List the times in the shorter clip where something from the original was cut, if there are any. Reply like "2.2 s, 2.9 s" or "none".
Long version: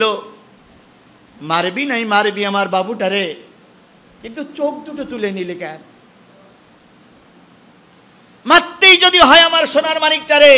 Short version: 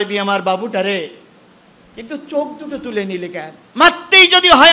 3.6 s